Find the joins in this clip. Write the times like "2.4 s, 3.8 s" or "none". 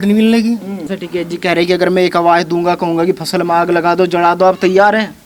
0.9 s